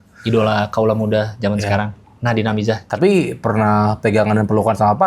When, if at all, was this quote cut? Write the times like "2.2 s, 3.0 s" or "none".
2.8 s